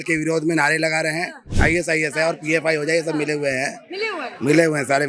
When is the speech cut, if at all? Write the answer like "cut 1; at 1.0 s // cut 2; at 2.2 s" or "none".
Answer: cut 1; at 1.5 s